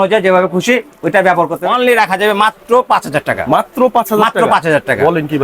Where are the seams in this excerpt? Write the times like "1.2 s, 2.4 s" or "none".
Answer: 1.6 s